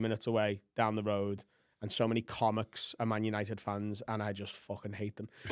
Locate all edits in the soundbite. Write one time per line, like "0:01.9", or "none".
none